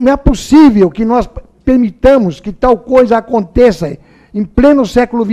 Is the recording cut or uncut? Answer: uncut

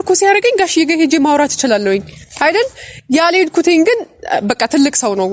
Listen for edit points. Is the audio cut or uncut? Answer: uncut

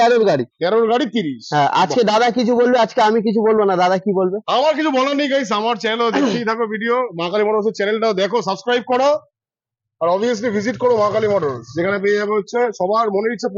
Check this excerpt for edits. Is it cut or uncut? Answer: uncut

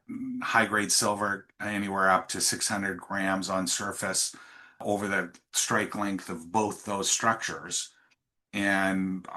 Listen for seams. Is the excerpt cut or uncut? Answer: cut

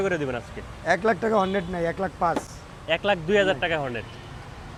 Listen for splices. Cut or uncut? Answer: uncut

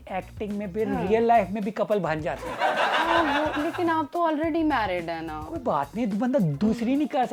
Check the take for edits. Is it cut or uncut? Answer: uncut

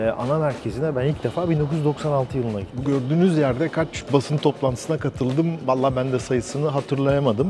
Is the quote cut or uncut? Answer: cut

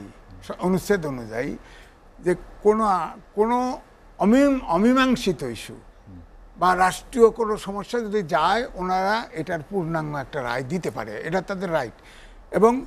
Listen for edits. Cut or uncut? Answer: uncut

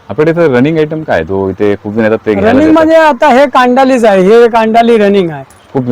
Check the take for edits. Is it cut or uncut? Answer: uncut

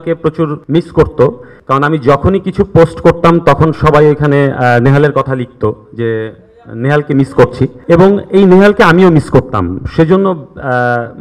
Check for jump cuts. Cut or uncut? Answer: uncut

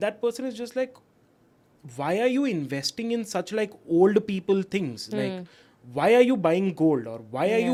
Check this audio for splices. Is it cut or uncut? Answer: uncut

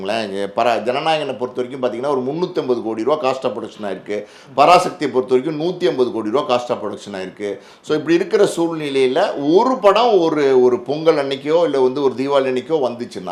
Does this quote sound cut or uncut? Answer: uncut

